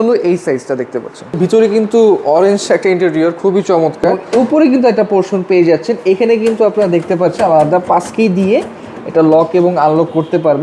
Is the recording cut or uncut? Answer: cut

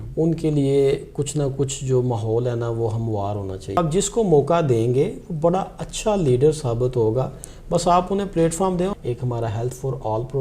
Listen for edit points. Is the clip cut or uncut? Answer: cut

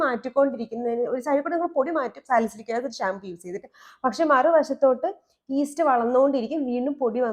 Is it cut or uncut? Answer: uncut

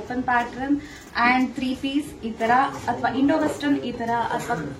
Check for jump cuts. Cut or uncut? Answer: uncut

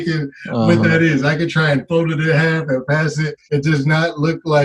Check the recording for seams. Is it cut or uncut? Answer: cut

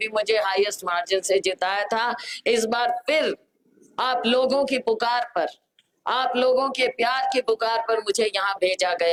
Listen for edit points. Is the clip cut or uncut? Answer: uncut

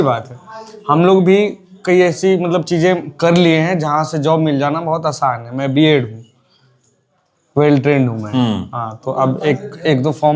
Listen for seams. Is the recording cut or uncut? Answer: uncut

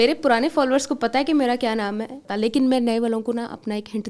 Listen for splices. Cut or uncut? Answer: cut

